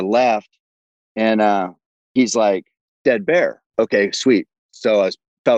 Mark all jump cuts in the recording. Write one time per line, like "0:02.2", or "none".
0:03.7